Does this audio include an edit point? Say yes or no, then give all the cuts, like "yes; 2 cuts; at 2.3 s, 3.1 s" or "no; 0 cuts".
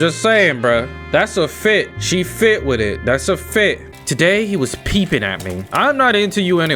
yes; 2 cuts; at 3.9 s, 5.7 s